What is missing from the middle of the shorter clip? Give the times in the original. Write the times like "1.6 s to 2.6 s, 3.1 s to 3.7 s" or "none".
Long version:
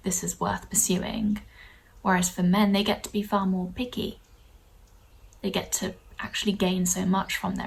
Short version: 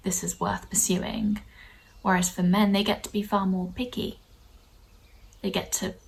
none